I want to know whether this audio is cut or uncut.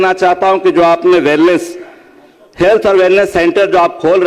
uncut